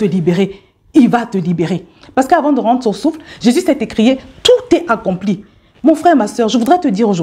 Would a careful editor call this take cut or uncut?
uncut